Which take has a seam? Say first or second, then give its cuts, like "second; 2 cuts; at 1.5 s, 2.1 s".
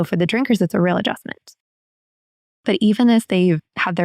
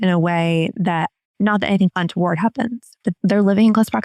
first; 1 cut; at 1.9 s